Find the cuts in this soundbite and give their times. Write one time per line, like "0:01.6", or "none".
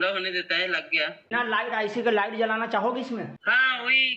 0:01.3